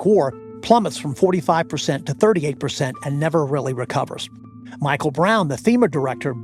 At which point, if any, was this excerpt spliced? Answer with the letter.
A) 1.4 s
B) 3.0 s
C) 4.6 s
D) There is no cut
D